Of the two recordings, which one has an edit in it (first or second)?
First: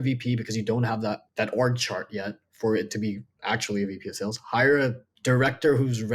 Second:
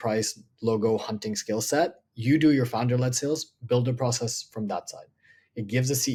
first